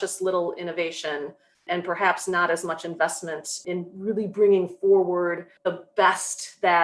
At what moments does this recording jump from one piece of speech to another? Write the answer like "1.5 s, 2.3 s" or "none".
1.6 s, 3.5 s, 5.5 s